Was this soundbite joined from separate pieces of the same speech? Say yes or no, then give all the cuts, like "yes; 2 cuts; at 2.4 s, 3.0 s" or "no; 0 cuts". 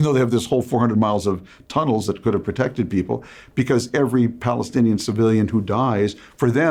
no; 0 cuts